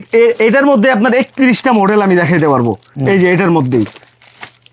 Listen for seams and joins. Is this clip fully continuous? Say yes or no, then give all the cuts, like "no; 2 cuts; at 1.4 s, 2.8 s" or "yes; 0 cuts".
yes; 0 cuts